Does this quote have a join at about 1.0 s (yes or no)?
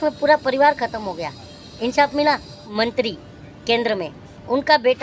no